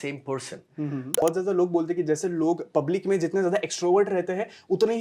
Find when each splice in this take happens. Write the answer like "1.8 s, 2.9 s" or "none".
1.2 s

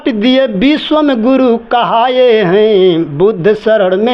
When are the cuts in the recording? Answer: none

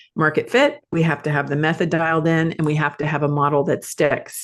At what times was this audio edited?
none

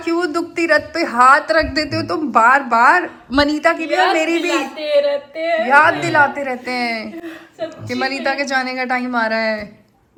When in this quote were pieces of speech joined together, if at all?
none

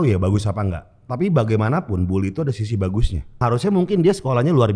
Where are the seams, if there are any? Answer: 3.4 s

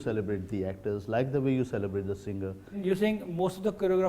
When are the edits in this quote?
2.8 s

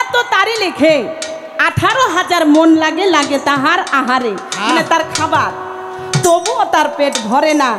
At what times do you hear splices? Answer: none

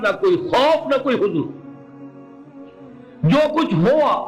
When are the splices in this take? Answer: 1.8 s, 3.2 s

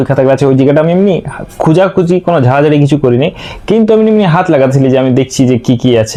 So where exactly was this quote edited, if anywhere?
none

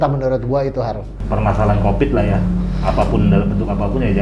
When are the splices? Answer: none

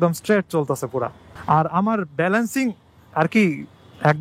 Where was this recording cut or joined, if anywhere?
none

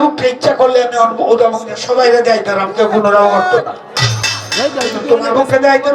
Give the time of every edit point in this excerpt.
none

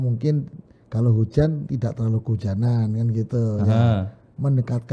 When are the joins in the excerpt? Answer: none

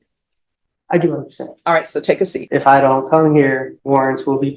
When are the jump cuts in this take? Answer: 2.4 s, 3.7 s

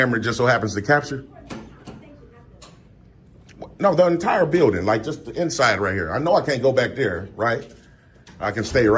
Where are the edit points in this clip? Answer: none

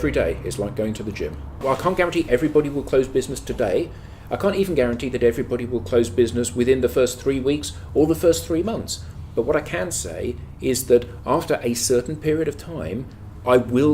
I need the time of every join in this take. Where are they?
1.6 s

